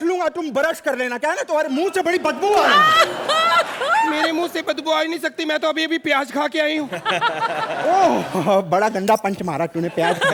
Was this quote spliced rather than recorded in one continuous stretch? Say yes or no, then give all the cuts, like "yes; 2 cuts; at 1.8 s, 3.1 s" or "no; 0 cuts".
no; 0 cuts